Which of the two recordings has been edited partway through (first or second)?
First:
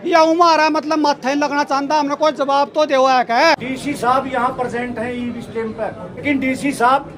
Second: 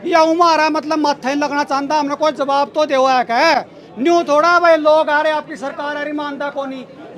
first